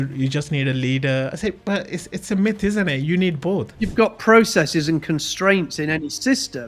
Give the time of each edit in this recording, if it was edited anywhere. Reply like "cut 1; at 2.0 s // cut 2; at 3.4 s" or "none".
cut 1; at 3.8 s

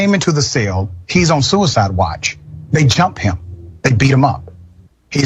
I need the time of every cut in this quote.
cut 1; at 0.9 s

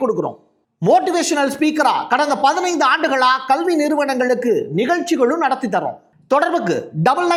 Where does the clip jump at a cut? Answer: none

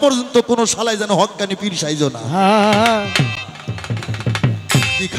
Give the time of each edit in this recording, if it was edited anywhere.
none

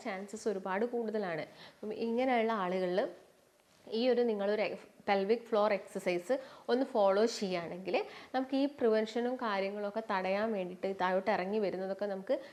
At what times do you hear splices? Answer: none

